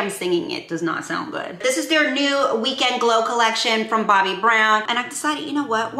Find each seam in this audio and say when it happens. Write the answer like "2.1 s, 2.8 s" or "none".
1.5 s, 4.9 s